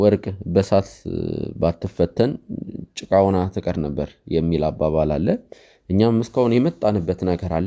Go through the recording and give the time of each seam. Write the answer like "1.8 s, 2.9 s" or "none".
none